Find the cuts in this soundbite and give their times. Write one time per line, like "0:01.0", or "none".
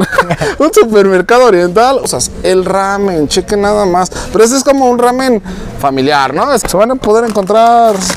0:02.1
0:06.6